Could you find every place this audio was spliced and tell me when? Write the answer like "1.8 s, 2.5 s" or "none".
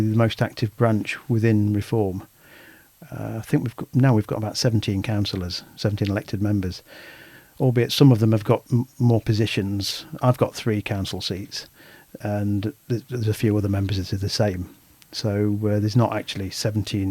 none